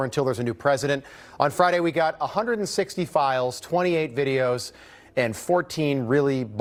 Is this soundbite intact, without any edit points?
yes; 0 cuts

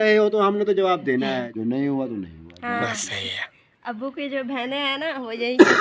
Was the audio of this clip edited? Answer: yes; 1 cut; at 1.5 s

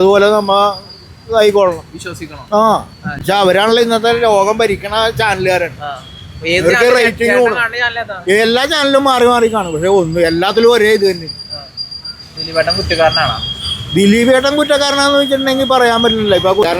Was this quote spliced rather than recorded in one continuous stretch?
no; 0 cuts

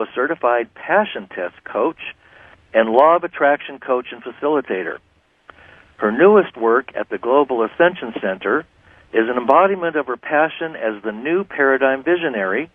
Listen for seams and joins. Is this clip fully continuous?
no; 1 cut; at 9.7 s

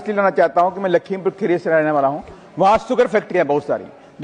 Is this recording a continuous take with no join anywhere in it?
yes; 0 cuts

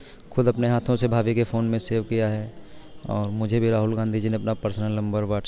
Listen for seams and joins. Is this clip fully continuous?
yes; 0 cuts

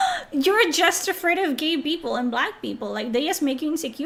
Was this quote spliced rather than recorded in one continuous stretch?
no; 0 cuts

